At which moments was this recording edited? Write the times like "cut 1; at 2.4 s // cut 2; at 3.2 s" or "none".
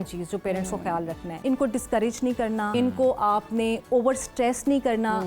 cut 1; at 1.3 s // cut 2; at 2.7 s